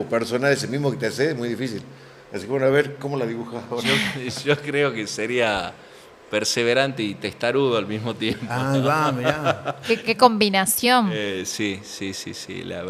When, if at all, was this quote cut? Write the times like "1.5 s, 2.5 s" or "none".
none